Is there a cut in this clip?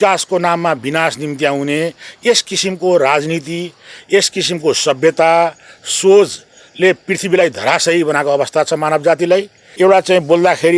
yes; 1 cut; at 9.6 s

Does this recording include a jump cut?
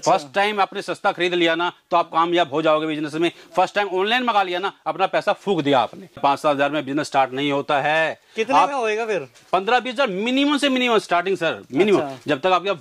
yes; 1 cut; at 6.2 s

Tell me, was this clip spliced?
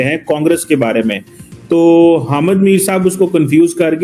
no; 0 cuts

